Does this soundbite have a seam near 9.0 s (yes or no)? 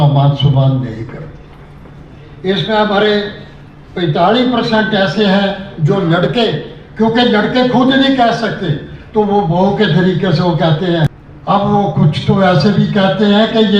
no